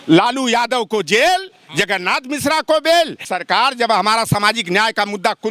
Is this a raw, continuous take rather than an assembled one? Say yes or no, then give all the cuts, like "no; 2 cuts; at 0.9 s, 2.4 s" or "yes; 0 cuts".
no; 1 cut; at 3.2 s